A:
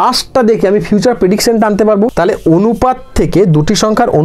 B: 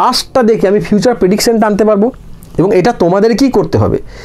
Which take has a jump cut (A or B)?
A